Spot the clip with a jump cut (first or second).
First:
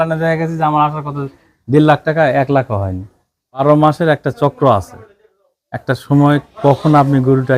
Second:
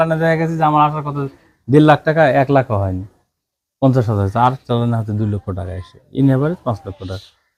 first